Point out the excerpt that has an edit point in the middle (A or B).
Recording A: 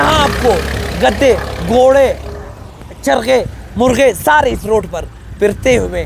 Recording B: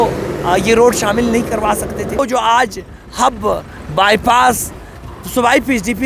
B